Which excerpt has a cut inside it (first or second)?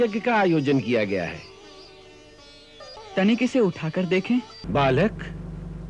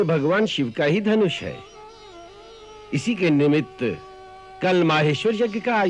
first